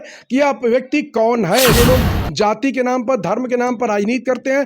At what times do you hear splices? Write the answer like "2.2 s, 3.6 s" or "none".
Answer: 1.7 s

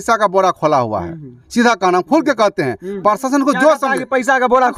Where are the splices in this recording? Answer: none

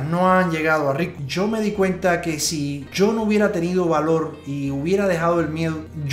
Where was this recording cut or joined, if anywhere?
none

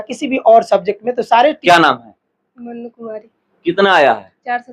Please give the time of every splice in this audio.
1.6 s

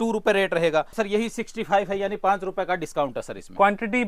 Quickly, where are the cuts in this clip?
0.9 s

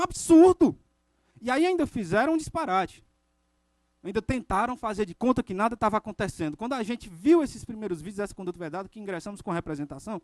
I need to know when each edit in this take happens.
2.0 s, 7.4 s

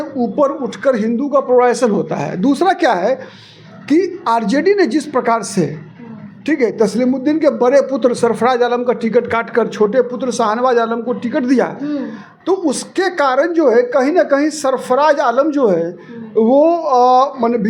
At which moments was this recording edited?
none

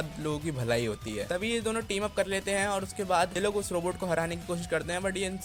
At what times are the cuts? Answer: none

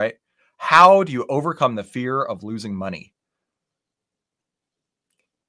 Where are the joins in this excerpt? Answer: none

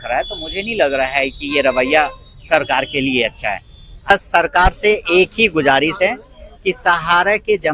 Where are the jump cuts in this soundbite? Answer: 4.1 s

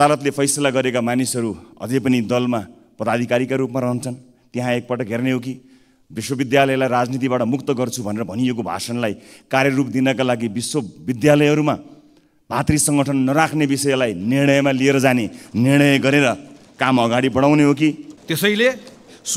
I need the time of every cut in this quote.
18.1 s

